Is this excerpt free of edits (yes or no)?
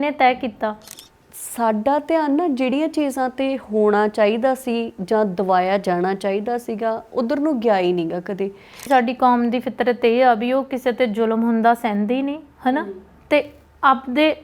no